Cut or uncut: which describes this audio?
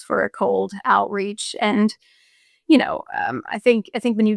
uncut